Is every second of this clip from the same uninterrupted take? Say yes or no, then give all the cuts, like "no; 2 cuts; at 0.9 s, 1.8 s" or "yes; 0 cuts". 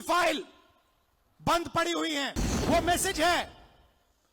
no; 1 cut; at 2.5 s